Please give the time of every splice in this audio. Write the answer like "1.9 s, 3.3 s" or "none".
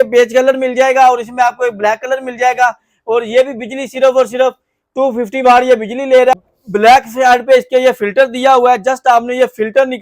6.4 s

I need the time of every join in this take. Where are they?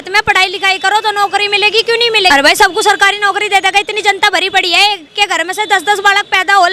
2.3 s

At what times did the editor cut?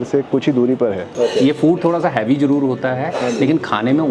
1.1 s

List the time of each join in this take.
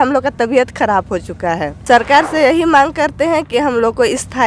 1.7 s

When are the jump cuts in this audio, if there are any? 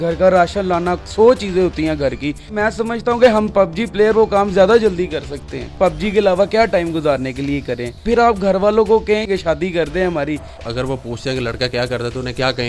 2.5 s, 5.7 s, 8.0 s, 9.3 s, 10.5 s

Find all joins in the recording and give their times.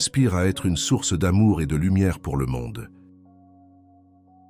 2.8 s

